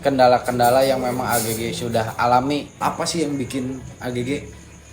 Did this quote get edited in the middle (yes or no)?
yes